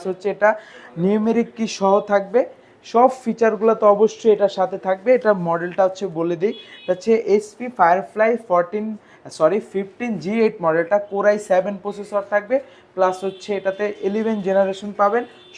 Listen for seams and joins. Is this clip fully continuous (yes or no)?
yes